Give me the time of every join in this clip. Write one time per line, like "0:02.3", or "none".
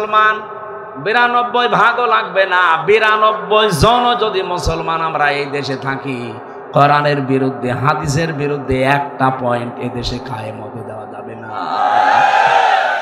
none